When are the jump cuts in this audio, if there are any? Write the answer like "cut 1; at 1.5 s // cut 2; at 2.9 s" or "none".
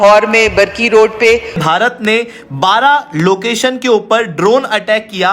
cut 1; at 1.6 s